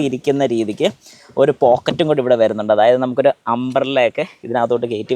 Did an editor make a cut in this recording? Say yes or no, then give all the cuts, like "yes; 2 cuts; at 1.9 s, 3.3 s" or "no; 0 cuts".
no; 0 cuts